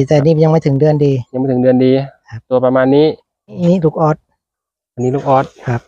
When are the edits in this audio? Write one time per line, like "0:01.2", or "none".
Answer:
0:03.6